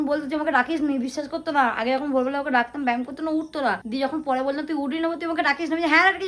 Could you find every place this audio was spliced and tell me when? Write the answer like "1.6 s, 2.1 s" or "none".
none